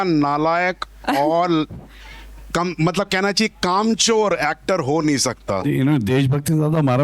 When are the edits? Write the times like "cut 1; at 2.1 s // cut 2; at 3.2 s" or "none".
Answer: cut 1; at 5.6 s